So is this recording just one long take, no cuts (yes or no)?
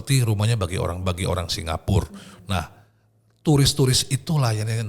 yes